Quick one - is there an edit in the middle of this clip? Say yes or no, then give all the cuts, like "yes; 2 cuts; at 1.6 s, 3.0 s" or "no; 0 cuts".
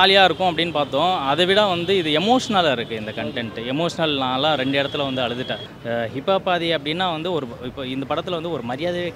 yes; 1 cut; at 5.7 s